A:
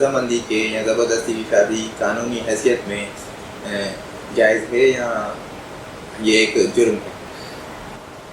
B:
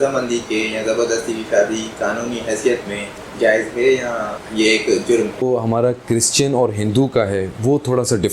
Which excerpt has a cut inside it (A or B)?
B